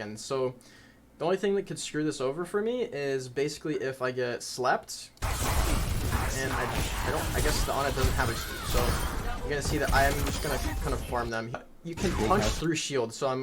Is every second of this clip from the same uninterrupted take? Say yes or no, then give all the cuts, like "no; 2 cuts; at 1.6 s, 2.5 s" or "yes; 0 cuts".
no; 1 cut; at 11.6 s